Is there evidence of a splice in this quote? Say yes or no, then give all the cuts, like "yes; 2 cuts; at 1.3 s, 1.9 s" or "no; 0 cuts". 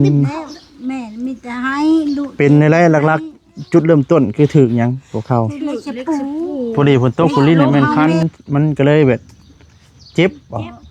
yes; 1 cut; at 6.7 s